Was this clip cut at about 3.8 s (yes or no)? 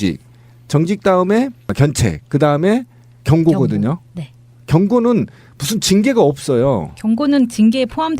no